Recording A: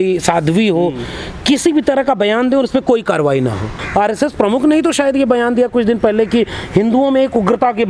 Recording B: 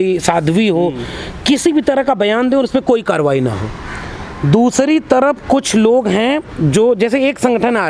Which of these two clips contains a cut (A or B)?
A